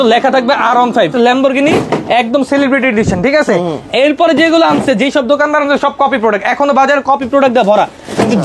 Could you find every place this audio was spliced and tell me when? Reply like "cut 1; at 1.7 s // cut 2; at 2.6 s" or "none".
cut 1; at 1.1 s